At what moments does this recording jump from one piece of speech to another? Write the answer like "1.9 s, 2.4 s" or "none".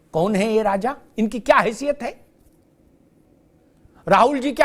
3.2 s